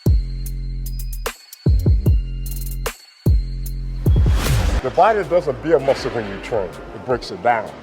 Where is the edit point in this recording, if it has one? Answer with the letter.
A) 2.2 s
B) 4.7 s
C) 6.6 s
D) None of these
B